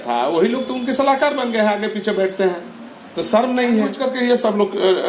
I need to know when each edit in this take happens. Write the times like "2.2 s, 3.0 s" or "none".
3.9 s